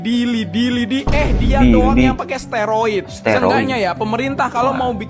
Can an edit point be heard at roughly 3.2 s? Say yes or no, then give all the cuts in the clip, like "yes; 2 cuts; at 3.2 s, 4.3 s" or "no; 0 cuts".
no; 0 cuts